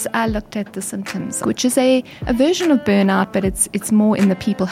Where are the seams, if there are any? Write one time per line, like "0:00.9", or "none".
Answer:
0:01.4